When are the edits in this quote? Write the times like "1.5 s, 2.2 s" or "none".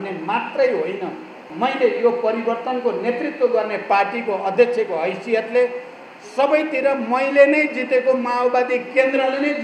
1.4 s